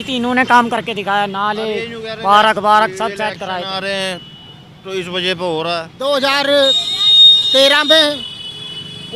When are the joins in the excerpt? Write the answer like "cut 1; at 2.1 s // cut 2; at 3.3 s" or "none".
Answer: cut 1; at 5.9 s

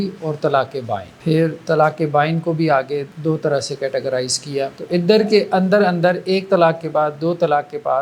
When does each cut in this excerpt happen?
cut 1; at 1.1 s // cut 2; at 3.1 s // cut 3; at 4.8 s

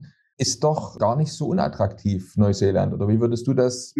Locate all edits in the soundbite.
none

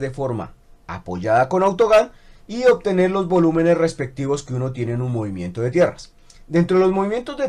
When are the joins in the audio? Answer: cut 1; at 2.9 s

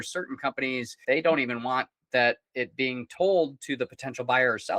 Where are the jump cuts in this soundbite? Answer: cut 1; at 1.0 s

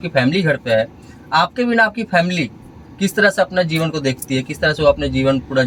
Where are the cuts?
none

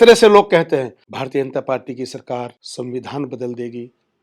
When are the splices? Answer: cut 1; at 1.0 s // cut 2; at 2.6 s

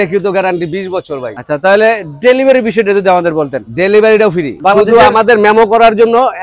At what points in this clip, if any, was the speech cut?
cut 1; at 1.3 s // cut 2; at 4.5 s

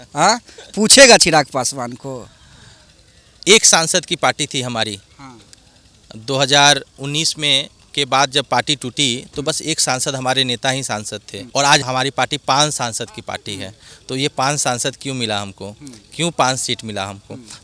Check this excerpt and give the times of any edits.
none

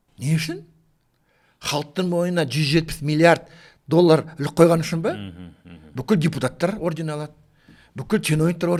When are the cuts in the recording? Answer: none

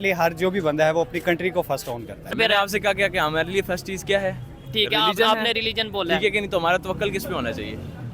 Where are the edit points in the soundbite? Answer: cut 1; at 2.3 s

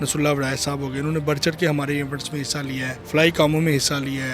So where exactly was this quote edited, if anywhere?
cut 1; at 2.9 s

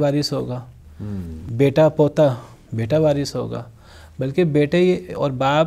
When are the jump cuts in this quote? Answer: none

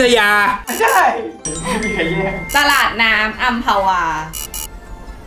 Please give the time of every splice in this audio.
none

